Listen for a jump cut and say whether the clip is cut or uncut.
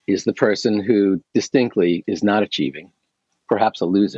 uncut